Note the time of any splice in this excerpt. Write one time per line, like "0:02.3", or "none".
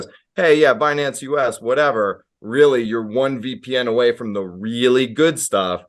none